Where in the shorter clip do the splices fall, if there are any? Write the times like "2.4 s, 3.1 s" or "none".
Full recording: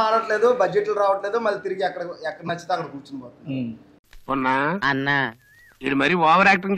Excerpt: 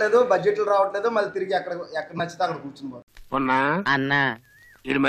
3.0 s